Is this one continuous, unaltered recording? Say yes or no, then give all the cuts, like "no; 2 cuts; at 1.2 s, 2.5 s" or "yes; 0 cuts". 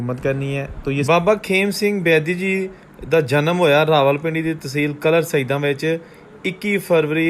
no; 1 cut; at 1.1 s